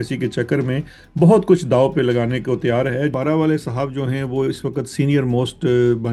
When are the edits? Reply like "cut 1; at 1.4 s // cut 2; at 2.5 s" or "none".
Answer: cut 1; at 3.1 s